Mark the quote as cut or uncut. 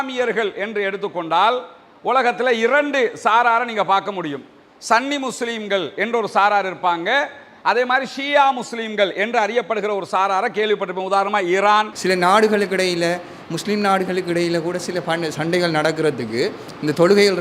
cut